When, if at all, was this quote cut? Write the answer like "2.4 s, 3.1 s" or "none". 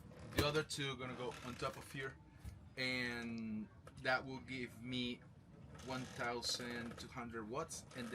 none